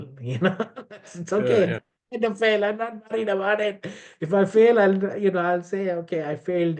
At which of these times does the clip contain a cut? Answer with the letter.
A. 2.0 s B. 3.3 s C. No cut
C